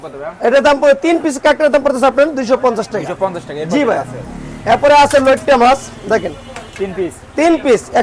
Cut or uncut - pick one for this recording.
uncut